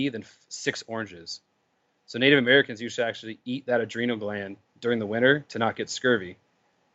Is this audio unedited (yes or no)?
yes